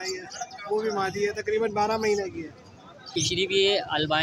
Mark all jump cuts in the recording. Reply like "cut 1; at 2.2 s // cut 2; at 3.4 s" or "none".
cut 1; at 3.1 s